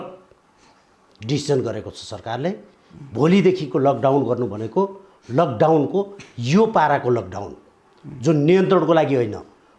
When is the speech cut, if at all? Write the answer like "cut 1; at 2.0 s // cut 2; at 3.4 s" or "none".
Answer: none